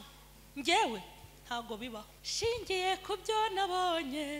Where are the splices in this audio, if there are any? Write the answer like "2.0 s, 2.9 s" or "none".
2.2 s